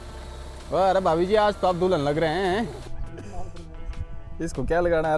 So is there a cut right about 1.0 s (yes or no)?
no